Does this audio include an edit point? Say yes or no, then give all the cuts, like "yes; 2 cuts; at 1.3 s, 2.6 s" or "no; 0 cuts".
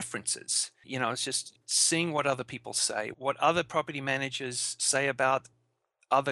yes; 2 cuts; at 1.5 s, 3.1 s